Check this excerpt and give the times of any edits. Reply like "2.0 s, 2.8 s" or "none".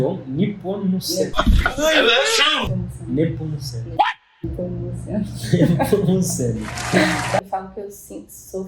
7.4 s